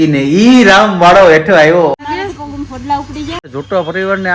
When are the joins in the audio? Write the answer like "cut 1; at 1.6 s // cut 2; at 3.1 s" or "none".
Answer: cut 1; at 1.9 s // cut 2; at 3.4 s

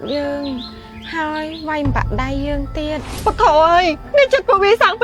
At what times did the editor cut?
cut 1; at 3.1 s

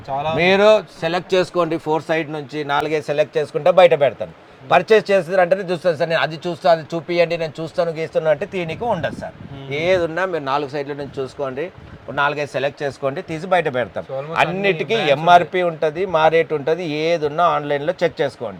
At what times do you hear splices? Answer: none

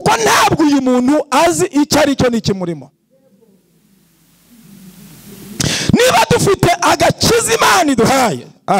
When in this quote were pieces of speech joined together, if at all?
none

